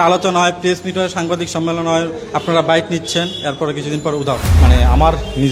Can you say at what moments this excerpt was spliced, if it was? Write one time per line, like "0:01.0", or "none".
0:04.5